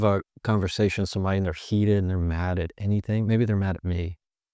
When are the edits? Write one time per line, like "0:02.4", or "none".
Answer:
none